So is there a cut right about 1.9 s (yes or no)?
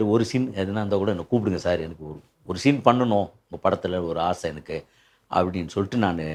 no